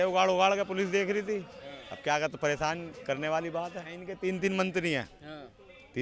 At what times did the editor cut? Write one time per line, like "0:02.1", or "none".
0:04.1